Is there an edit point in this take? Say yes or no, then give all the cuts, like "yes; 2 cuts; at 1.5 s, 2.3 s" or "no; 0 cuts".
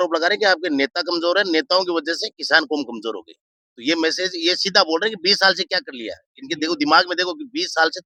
no; 0 cuts